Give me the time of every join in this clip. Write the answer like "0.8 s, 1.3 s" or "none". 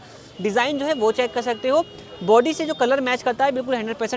none

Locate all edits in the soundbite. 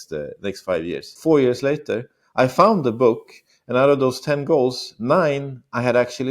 1.1 s

